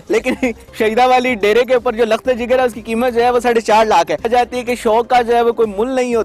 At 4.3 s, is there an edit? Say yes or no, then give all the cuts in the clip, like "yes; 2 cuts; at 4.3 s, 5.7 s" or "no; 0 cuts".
yes; 1 cut; at 4.3 s